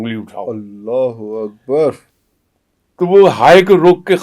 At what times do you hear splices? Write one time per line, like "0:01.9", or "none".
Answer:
0:02.1